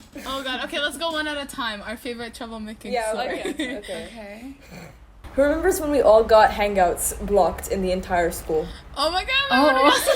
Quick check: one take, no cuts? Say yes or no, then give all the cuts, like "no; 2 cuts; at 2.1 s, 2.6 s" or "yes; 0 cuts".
yes; 0 cuts